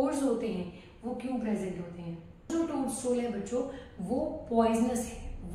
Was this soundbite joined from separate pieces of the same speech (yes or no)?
yes